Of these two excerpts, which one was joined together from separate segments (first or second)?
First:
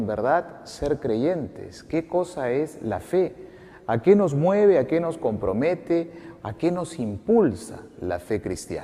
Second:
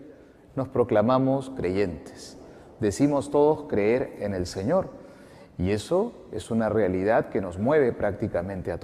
second